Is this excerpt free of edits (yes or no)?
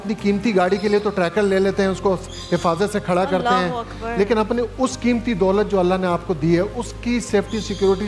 yes